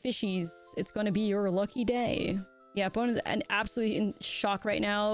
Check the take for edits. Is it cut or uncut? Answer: cut